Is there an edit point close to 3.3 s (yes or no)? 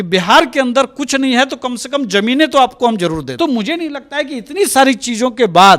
yes